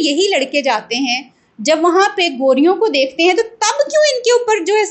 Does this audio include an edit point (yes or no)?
no